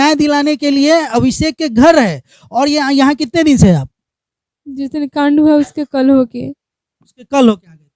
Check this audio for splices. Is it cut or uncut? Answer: uncut